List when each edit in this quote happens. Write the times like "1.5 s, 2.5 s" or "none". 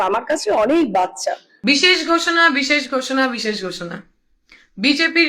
1.5 s

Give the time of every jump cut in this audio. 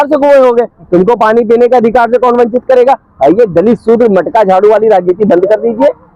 none

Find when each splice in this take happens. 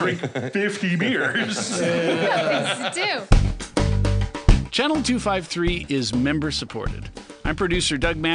3.2 s

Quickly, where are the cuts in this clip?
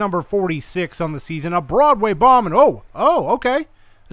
none

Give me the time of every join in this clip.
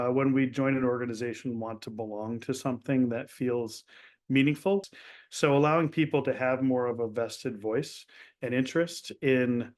4.9 s

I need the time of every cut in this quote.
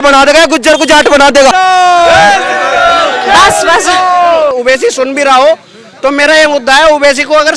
1.5 s, 4.5 s

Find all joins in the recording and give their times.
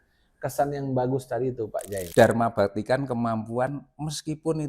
2.1 s

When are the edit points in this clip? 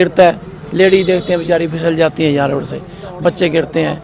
none

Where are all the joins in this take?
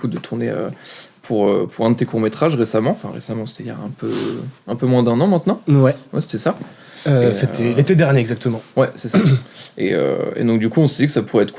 none

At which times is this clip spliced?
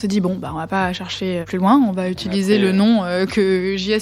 1.5 s

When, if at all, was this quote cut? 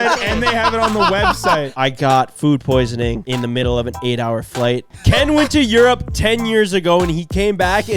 1.7 s, 3.2 s, 4.9 s

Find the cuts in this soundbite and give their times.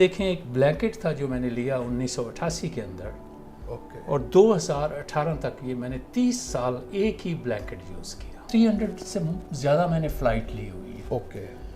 8.5 s

